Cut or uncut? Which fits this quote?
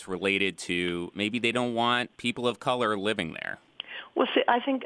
cut